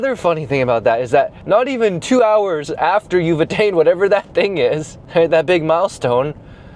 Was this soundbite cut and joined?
yes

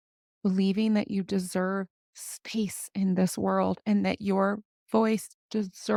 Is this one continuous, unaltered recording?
yes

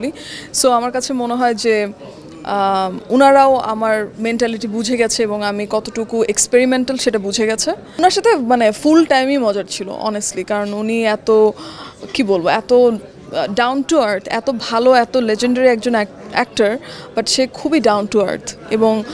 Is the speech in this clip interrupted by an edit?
yes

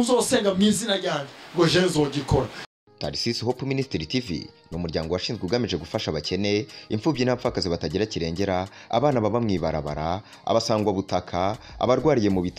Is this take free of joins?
no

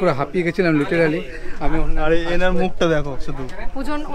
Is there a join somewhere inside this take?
no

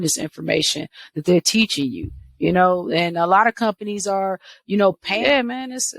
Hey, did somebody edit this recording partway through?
yes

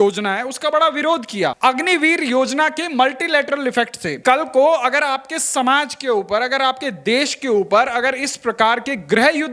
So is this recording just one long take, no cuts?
no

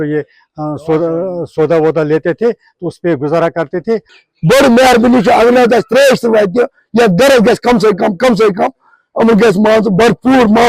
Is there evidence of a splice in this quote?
yes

